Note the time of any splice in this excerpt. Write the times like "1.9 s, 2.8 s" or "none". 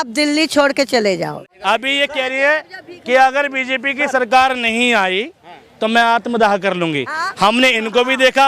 1.4 s